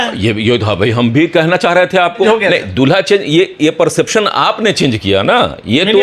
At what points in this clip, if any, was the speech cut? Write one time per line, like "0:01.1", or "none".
0:02.3

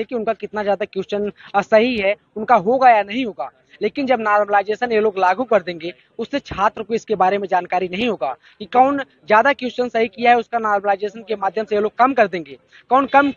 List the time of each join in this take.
none

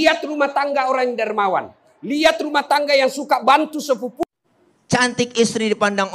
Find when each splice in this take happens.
0:04.2

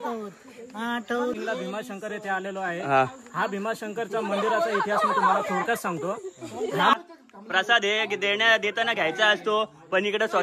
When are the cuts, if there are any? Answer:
0:01.3
0:06.9

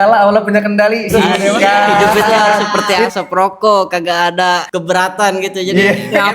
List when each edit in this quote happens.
0:02.7
0:04.7

